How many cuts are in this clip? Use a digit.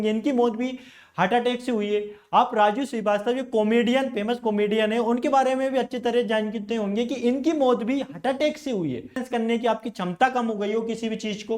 1